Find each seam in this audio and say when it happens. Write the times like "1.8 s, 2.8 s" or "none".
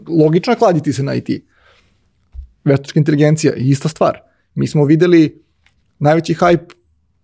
none